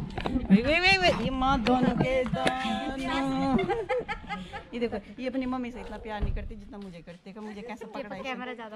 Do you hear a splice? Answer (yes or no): no